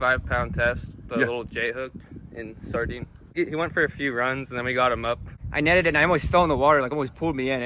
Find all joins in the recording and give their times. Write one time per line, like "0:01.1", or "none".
0:03.2
0:05.4